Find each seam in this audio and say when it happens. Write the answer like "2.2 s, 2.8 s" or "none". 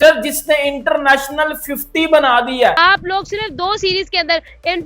2.8 s